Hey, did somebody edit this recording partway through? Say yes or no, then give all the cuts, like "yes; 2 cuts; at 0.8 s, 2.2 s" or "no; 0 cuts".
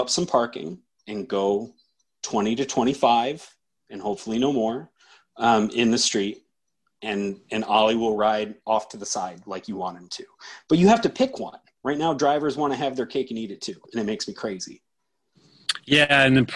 no; 0 cuts